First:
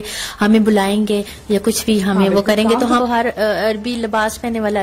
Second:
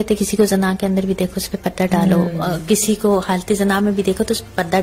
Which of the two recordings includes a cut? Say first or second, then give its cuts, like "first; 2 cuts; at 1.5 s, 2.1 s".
first; 1 cut; at 3.0 s